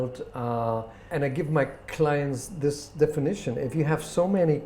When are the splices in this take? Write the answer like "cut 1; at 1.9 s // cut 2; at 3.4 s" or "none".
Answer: cut 1; at 1.0 s